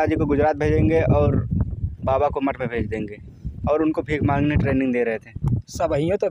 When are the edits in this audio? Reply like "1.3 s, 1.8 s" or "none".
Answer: none